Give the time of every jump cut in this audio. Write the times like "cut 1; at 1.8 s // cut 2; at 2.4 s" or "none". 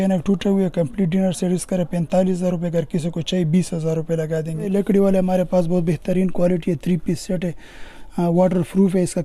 cut 1; at 4.7 s